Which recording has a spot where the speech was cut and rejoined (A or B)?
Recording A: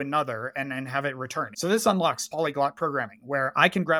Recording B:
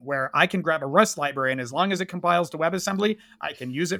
A